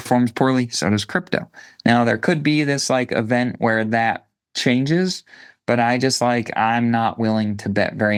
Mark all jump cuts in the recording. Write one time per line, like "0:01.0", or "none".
none